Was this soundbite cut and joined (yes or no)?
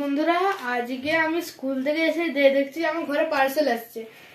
no